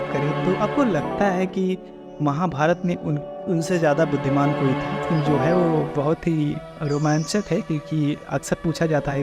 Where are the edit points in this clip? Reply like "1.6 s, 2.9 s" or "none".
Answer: 5.1 s